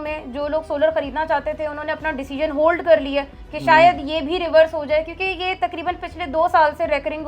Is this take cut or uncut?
uncut